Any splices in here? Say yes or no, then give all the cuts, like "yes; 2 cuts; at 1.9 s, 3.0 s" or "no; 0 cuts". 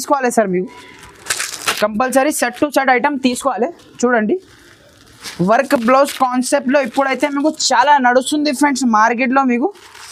no; 0 cuts